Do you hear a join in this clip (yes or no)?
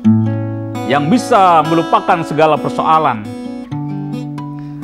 no